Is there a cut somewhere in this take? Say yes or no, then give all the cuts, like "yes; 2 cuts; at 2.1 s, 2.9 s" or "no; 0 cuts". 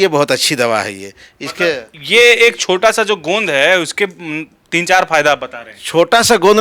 no; 0 cuts